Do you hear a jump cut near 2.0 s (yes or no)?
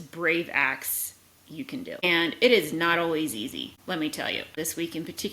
yes